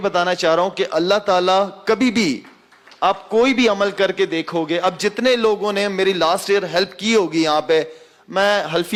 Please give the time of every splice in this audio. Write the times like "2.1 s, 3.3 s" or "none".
none